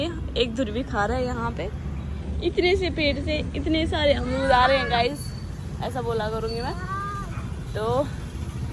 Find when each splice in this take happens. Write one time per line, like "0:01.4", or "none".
none